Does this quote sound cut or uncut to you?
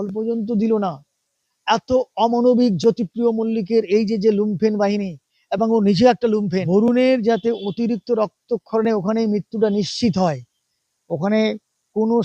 cut